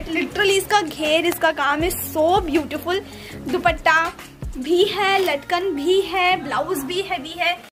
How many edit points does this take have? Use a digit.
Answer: 0